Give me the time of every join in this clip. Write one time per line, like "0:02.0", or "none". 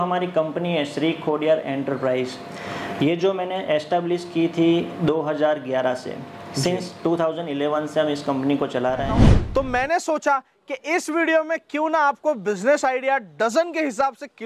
0:09.3